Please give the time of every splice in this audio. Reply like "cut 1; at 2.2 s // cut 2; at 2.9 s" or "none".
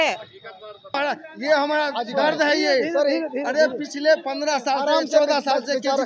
cut 1; at 1.1 s